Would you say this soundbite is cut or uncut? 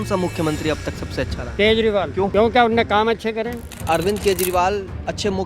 cut